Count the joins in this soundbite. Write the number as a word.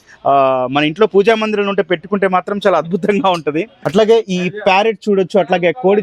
one